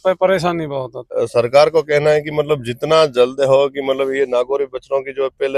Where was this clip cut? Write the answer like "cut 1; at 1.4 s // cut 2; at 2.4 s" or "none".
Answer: cut 1; at 1.0 s